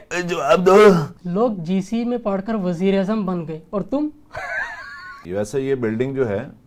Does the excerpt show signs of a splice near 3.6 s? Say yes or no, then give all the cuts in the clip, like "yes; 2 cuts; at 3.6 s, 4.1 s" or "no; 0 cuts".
no; 2 cuts; at 1.2 s, 5.2 s